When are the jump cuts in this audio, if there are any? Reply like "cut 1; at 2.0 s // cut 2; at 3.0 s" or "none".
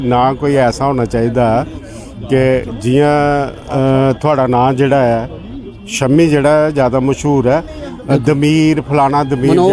none

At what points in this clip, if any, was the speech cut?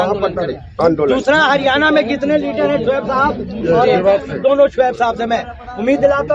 none

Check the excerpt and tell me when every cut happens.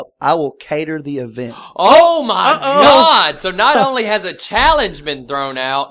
none

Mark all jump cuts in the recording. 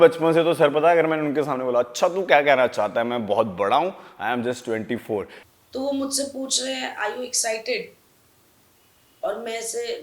cut 1; at 5.4 s

